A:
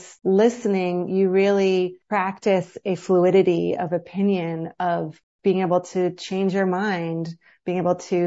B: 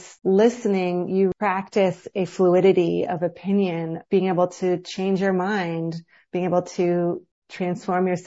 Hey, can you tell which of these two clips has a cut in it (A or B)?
B